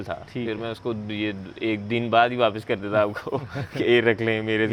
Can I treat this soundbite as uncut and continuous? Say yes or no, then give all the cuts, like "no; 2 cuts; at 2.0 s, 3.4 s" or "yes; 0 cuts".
yes; 0 cuts